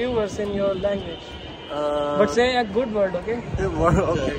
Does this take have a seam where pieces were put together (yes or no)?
no